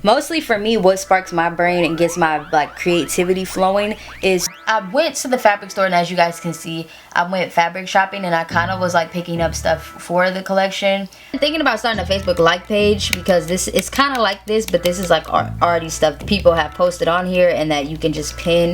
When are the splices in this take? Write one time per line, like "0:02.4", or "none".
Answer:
0:04.5
0:11.4
0:16.2